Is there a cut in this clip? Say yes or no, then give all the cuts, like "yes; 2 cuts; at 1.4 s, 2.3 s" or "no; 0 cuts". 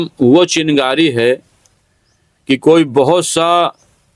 no; 0 cuts